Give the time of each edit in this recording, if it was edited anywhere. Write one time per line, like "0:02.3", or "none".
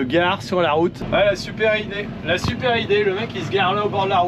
0:01.0